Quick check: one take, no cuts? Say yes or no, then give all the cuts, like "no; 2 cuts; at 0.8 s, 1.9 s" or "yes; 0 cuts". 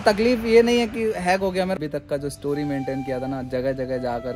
no; 1 cut; at 1.8 s